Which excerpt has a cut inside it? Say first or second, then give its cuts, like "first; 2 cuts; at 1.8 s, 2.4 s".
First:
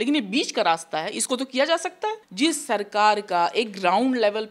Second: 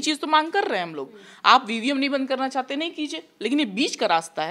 first; 1 cut; at 2.2 s